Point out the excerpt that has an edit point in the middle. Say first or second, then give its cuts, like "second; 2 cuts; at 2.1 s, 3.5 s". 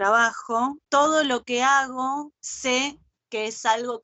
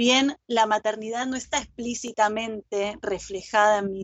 first; 2 cuts; at 0.8 s, 2.4 s